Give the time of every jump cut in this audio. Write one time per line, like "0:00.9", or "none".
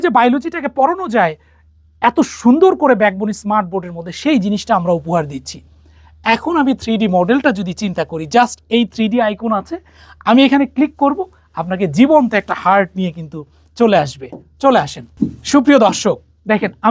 none